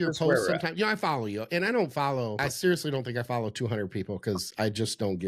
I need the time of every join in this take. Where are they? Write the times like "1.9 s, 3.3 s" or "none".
2.4 s